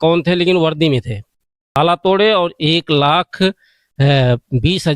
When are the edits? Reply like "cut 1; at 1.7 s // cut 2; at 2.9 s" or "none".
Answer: cut 1; at 1.8 s